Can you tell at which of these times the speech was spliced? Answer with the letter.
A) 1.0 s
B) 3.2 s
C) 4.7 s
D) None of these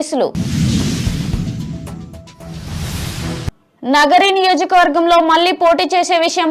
D